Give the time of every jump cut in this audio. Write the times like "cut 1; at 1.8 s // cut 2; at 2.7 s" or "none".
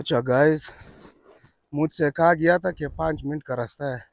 none